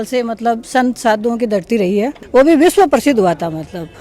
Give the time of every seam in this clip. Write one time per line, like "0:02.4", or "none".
0:02.1